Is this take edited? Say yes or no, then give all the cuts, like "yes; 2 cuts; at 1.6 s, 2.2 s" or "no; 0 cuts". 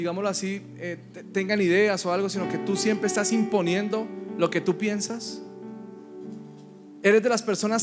no; 0 cuts